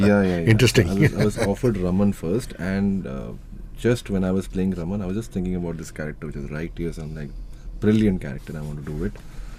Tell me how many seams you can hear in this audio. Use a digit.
0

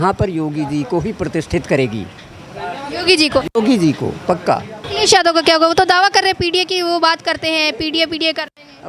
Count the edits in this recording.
1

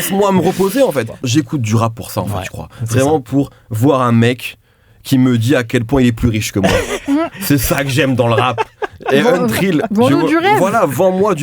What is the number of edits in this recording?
1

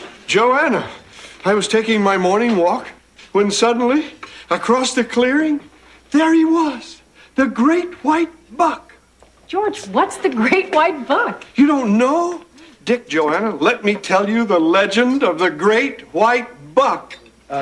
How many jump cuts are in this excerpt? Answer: 1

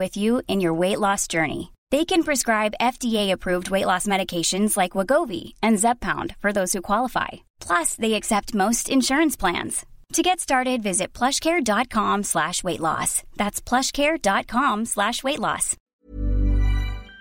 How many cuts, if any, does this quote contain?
1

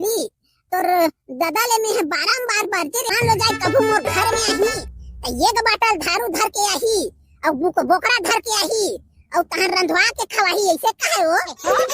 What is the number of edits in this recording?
1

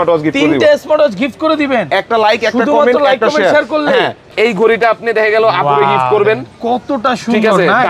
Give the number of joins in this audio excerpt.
1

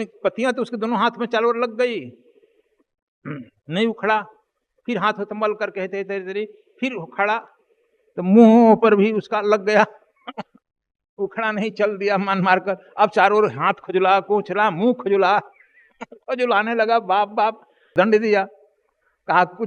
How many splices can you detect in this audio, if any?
1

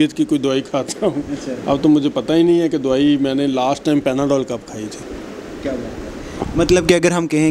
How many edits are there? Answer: 0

